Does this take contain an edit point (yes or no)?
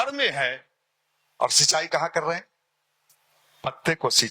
no